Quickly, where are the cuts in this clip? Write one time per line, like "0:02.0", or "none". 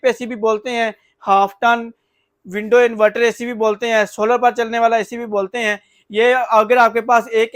none